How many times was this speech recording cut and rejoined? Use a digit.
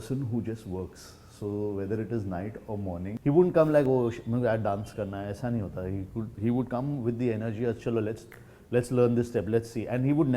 1